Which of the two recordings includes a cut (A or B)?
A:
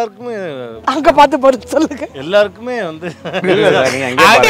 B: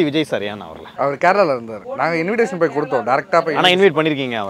B